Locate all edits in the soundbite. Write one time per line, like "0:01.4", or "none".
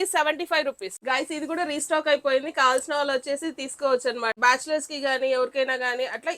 0:00.9
0:04.4